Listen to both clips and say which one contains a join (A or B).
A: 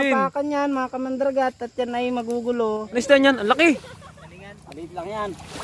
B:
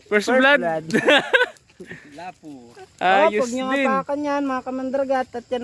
A